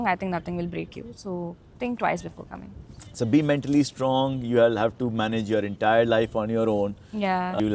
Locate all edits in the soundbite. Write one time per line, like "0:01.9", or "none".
none